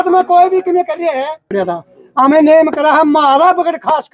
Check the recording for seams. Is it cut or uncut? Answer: cut